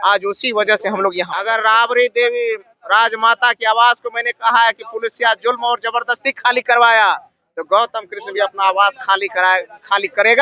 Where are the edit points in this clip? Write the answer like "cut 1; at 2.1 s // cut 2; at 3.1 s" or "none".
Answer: cut 1; at 1.4 s